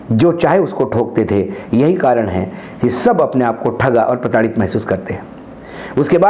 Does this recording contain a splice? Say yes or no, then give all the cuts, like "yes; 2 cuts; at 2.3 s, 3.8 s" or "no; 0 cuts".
no; 0 cuts